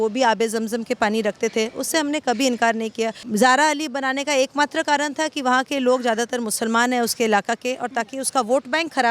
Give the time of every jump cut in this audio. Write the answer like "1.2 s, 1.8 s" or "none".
3.2 s